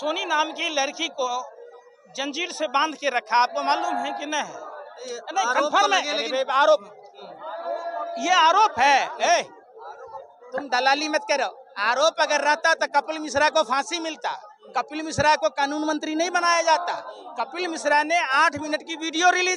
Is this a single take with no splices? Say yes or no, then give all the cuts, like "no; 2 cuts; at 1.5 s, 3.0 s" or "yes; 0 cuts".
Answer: yes; 0 cuts